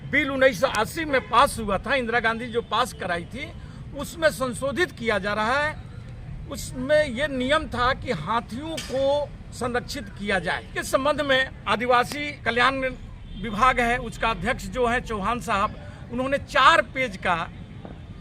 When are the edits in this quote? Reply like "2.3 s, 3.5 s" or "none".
10.8 s, 11.6 s, 12.3 s